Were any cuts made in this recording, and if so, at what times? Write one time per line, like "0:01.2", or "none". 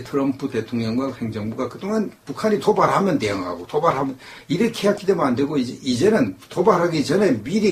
none